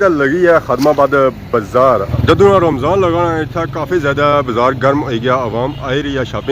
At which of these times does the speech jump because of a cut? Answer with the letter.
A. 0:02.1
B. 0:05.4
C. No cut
A